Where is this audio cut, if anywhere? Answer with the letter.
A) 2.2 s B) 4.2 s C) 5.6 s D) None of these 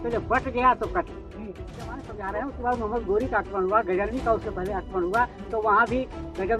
A